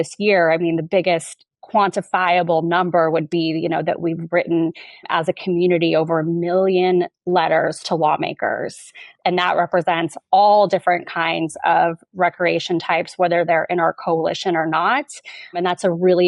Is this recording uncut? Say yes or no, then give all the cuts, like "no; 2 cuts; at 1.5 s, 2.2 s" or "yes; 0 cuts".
no; 3 cuts; at 5.1 s, 9.1 s, 15.6 s